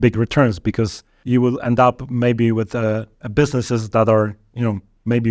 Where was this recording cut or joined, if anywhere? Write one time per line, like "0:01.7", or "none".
0:01.2